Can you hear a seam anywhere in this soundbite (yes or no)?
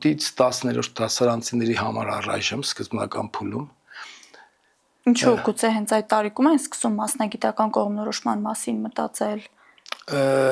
no